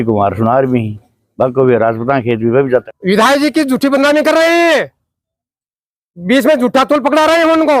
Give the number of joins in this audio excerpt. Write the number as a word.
one